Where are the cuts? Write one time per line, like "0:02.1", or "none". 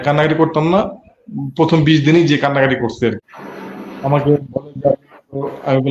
0:03.2